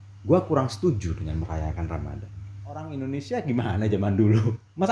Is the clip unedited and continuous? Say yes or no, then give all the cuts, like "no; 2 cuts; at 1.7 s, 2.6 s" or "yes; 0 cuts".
no; 1 cut; at 2.8 s